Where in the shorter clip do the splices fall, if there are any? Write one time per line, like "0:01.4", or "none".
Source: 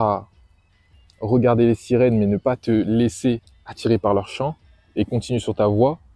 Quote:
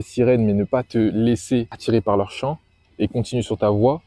0:01.7